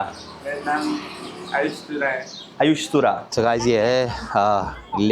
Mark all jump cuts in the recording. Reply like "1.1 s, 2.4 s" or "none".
3.3 s